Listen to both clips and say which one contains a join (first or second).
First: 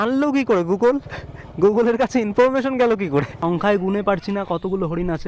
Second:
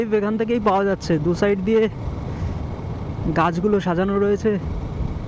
first